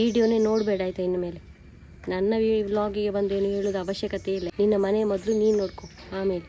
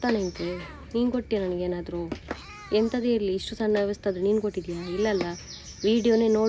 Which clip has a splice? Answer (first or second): first